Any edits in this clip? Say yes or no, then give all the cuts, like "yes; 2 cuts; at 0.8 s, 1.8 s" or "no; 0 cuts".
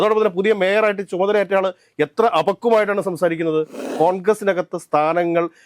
yes; 1 cut; at 3.8 s